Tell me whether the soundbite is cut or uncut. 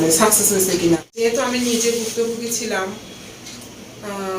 cut